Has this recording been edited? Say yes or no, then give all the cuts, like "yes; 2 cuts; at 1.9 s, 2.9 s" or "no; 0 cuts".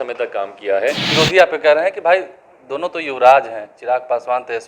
yes; 1 cut; at 1.0 s